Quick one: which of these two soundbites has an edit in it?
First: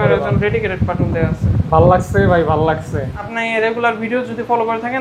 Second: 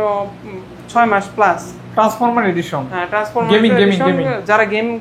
first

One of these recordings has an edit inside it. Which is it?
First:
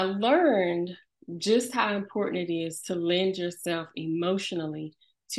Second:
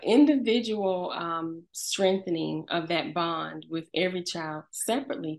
first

